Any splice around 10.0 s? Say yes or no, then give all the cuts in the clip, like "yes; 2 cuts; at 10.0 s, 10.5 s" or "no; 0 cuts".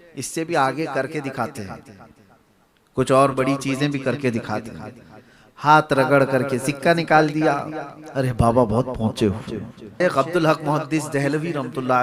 yes; 1 cut; at 10.0 s